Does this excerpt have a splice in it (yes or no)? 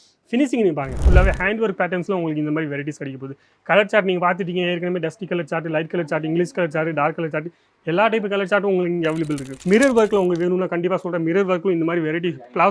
yes